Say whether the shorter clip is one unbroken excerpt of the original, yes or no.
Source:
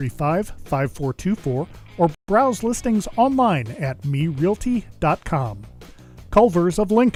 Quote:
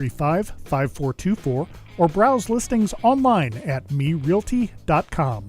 no